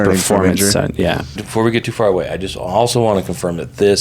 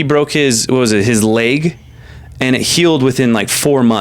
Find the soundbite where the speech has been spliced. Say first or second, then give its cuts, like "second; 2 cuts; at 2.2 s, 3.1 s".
first; 1 cut; at 1.4 s